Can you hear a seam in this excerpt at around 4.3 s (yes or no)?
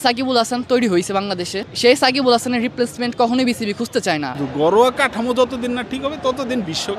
yes